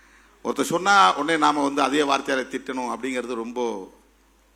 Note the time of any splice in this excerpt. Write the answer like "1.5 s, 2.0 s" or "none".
none